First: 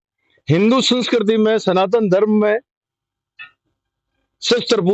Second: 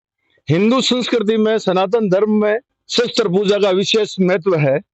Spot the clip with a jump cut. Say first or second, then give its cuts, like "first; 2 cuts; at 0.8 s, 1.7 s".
second; 1 cut; at 2.8 s